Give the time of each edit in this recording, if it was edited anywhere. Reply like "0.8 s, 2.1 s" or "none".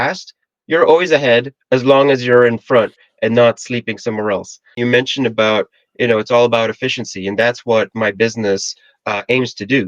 4.8 s